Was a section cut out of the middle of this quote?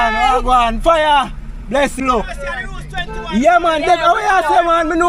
yes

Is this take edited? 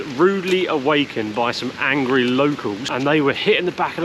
yes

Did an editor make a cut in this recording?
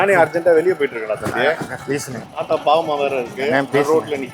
yes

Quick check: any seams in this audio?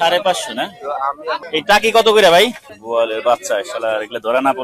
yes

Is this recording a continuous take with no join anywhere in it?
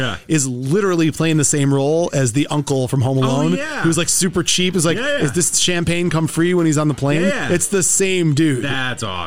yes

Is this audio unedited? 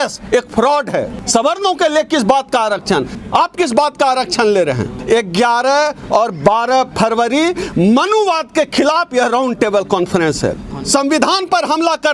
no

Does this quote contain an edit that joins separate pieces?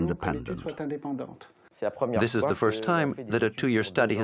no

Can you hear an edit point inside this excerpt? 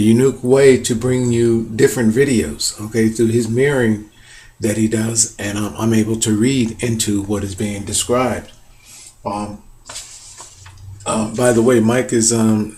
yes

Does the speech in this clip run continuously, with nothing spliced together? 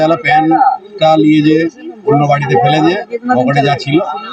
yes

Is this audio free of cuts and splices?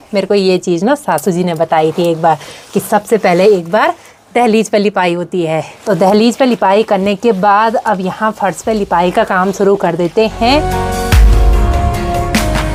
yes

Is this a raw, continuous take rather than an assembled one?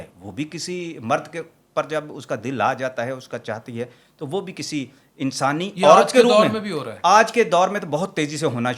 yes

